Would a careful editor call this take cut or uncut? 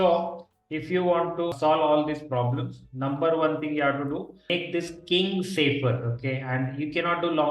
cut